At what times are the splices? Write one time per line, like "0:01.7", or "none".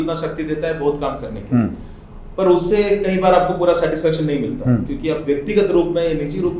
none